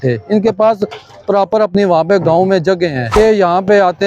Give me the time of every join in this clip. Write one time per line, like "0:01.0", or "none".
0:03.2